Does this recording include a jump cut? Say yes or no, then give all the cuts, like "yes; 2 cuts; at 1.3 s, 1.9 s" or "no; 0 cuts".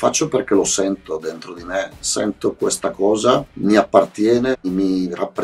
yes; 2 cuts; at 3.5 s, 4.6 s